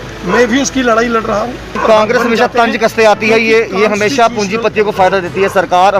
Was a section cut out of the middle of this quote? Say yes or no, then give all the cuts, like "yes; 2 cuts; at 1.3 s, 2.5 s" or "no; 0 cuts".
yes; 1 cut; at 1.8 s